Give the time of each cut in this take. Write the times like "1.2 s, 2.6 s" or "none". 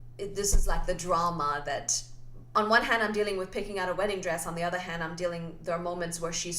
2.5 s